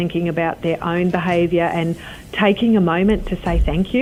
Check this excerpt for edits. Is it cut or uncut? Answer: uncut